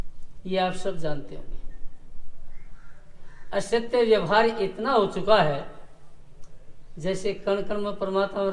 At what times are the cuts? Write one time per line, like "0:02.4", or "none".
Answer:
none